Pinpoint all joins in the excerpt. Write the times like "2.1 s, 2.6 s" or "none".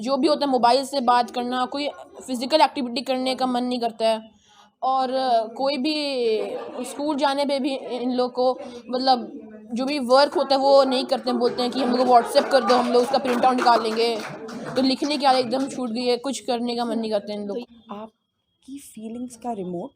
17.6 s